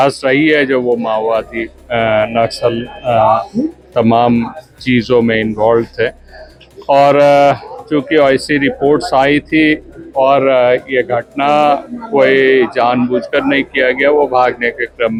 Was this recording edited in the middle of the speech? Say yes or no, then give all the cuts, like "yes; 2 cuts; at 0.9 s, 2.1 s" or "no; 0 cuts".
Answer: no; 0 cuts